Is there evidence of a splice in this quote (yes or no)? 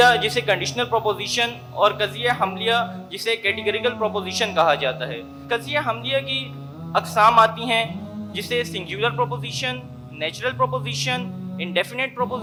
no